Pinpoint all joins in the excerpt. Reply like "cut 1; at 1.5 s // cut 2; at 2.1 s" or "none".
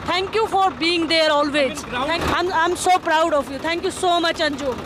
cut 1; at 2.2 s